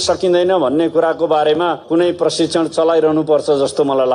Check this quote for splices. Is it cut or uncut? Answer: uncut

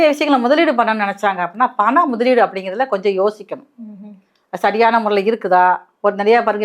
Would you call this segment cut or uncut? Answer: uncut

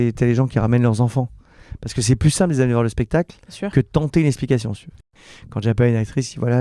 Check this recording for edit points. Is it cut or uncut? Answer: cut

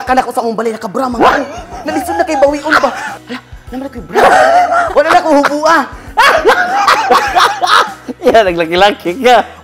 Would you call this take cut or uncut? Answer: cut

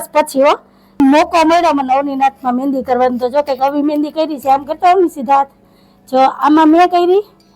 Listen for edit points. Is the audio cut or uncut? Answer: cut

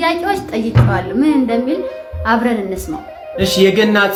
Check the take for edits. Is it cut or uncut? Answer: uncut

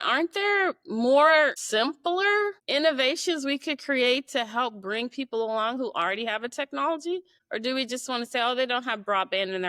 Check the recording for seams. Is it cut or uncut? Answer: uncut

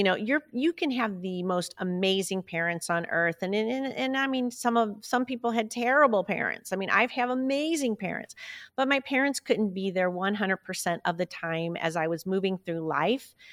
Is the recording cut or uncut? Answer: uncut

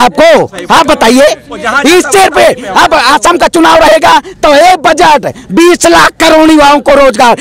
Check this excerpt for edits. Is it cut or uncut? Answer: uncut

